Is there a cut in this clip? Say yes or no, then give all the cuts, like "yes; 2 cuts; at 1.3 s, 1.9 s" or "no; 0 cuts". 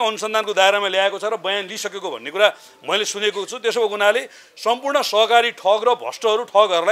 no; 0 cuts